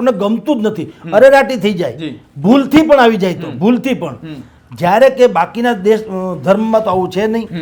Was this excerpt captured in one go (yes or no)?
yes